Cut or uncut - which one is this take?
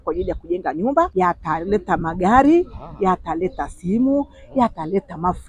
cut